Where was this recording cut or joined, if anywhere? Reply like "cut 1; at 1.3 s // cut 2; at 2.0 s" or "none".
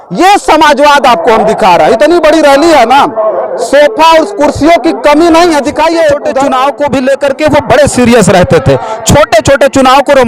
cut 1; at 6.3 s